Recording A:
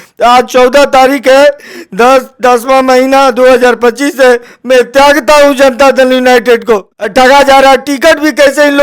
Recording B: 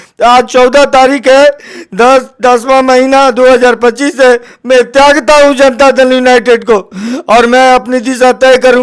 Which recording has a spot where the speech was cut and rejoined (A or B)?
A